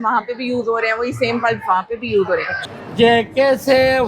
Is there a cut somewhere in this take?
yes; 1 cut; at 2.6 s

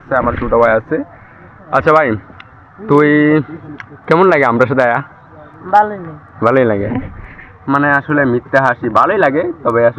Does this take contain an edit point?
no; 0 cuts

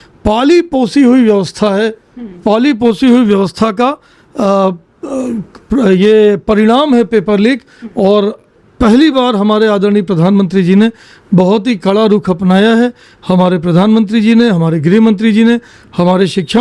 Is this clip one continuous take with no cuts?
yes; 0 cuts

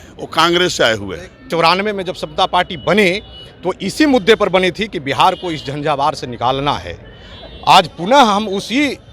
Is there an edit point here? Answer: yes; 1 cut; at 1.5 s

